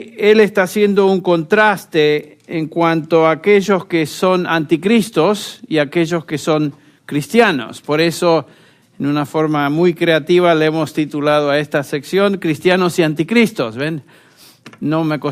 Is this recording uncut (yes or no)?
no